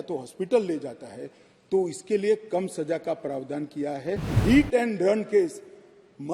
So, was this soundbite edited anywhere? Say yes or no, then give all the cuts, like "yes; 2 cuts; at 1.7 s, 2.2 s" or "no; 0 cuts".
yes; 1 cut; at 4.4 s